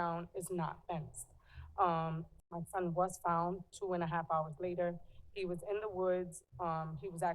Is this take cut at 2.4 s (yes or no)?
yes